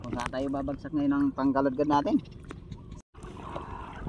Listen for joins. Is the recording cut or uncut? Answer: cut